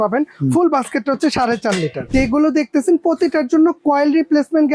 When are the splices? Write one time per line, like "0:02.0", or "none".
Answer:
0:02.1